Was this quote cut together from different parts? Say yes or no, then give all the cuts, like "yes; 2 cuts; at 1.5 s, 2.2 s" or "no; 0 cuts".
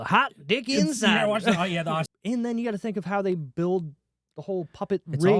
yes; 1 cut; at 2.1 s